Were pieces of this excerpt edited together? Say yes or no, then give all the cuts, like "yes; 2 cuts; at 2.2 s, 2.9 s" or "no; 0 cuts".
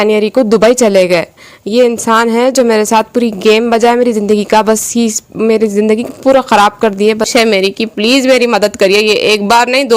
yes; 1 cut; at 7.3 s